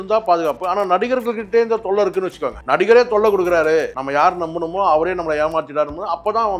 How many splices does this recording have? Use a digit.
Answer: 2